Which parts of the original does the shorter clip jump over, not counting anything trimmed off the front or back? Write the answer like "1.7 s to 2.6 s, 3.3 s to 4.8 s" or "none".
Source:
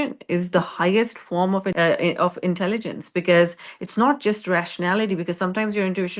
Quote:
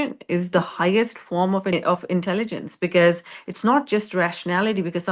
1.7 s to 2.1 s